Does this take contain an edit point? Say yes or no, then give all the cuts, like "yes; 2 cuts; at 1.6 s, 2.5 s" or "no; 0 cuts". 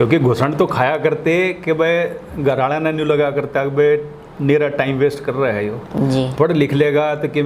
no; 0 cuts